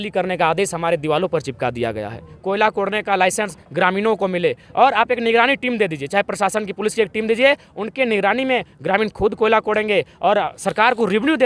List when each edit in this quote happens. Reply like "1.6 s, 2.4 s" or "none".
2.3 s